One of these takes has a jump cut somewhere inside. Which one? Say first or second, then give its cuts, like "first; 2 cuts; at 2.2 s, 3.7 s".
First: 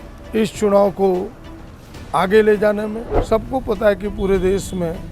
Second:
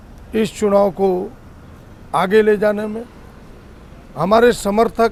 first; 1 cut; at 3.1 s